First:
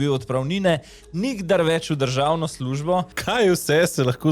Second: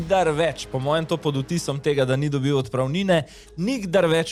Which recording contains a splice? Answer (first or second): first